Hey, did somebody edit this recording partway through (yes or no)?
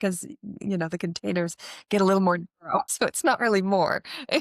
yes